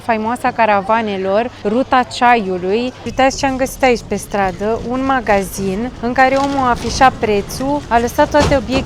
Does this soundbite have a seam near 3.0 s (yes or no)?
yes